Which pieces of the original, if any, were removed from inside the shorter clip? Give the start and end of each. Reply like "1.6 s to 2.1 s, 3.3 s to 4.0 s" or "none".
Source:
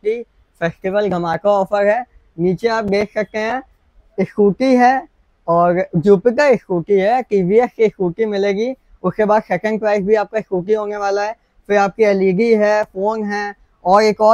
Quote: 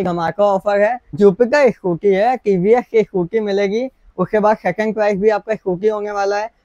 2.1 s to 5.9 s